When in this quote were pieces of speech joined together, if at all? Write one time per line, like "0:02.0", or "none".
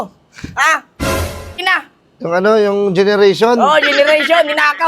0:01.6